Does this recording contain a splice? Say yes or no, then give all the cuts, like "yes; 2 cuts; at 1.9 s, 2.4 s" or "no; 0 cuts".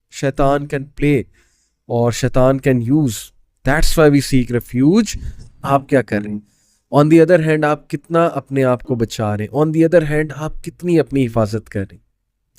yes; 1 cut; at 5.6 s